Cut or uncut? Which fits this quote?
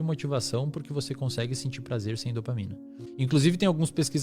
cut